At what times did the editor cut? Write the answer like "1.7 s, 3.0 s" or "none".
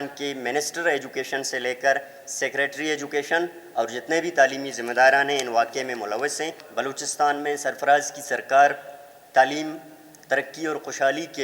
6.6 s